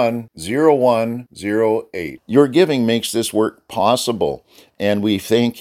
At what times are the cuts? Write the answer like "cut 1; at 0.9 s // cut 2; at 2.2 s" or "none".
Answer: none